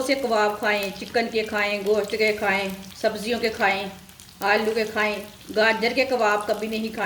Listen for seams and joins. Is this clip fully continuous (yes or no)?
no